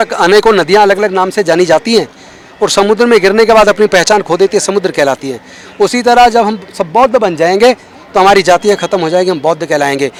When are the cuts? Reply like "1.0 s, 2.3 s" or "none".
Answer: none